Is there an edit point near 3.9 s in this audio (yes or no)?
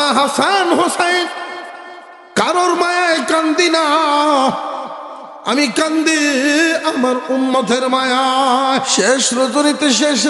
no